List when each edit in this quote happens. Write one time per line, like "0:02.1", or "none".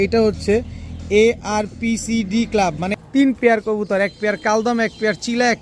0:02.9